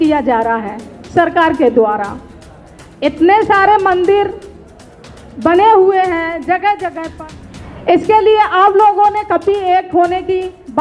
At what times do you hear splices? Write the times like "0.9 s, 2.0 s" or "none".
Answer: 7.1 s